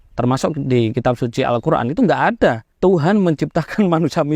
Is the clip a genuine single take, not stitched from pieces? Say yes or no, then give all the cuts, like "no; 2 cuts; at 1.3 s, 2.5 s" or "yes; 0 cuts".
no; 1 cut; at 2.7 s